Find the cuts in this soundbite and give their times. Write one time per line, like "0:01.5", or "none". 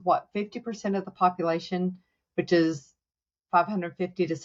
none